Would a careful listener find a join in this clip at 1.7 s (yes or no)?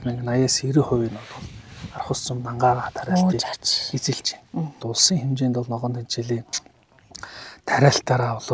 no